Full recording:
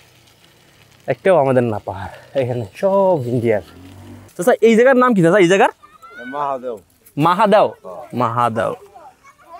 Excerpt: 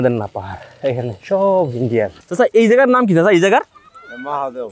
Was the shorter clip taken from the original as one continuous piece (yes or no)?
no